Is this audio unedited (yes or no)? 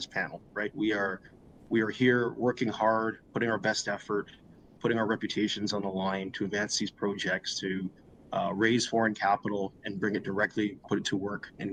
yes